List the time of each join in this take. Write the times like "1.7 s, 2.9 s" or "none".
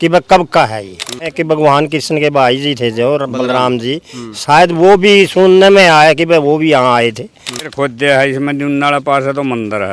1.3 s, 7.7 s